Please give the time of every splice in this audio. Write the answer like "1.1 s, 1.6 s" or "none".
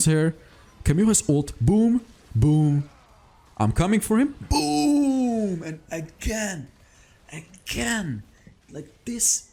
none